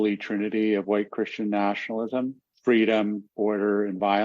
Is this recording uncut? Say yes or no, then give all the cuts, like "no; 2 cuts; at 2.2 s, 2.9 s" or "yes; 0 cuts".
no; 1 cut; at 2.5 s